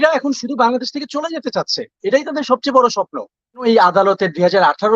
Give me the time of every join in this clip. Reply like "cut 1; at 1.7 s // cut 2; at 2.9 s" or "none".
cut 1; at 3.6 s